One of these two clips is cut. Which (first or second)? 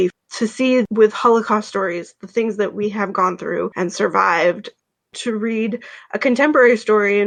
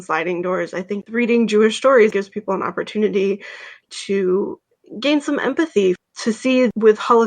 second